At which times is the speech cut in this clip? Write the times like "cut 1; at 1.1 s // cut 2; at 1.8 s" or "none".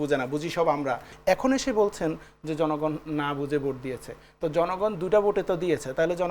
cut 1; at 1.1 s